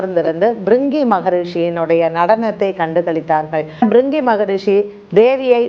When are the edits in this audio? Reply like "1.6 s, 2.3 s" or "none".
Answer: 3.8 s